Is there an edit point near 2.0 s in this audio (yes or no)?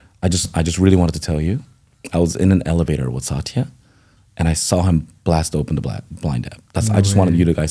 no